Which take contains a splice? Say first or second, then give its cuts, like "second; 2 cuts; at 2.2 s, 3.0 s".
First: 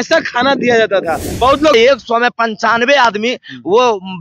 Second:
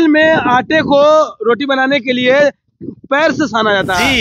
first; 1 cut; at 1.7 s